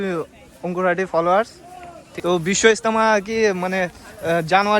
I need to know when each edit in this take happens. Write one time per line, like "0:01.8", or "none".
0:02.0